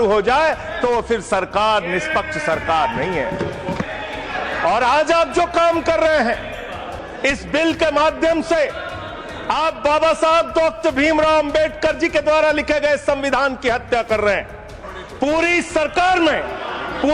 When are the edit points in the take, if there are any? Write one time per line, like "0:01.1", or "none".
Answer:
0:03.9
0:14.9